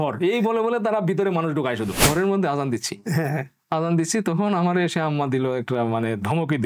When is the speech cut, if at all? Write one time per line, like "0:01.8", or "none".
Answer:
0:02.0

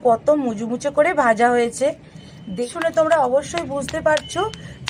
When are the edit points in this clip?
0:02.6

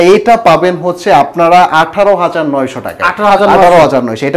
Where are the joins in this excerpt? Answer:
none

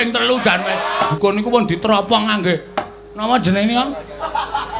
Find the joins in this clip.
0:01.1

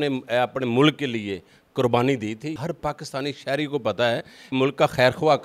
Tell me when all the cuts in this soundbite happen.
0:02.5
0:04.5

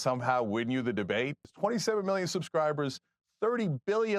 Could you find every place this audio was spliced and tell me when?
0:01.5

